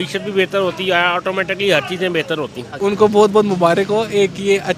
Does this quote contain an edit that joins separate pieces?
yes; 1 cut; at 2.8 s

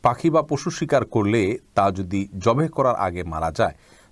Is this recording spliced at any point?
no; 0 cuts

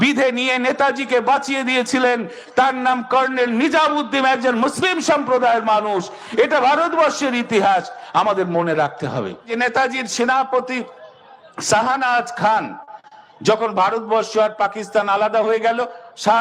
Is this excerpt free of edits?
no; 1 cut; at 9.5 s

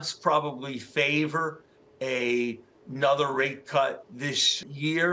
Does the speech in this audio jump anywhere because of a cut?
no; 0 cuts

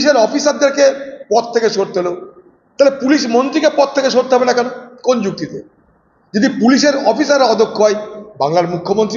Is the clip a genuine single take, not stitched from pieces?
yes; 0 cuts

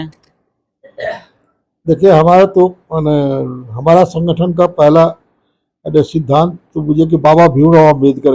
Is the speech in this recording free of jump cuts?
yes; 0 cuts

